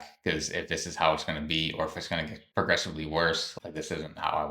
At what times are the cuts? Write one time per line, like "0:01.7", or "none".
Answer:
0:02.4
0:03.5